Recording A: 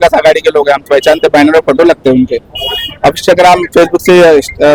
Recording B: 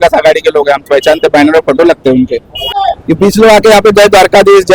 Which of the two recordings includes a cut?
B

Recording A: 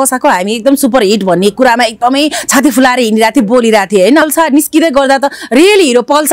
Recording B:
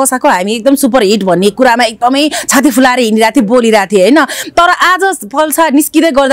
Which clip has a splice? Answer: A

